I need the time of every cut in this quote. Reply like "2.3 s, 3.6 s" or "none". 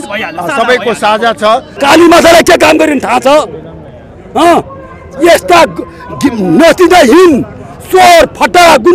1.7 s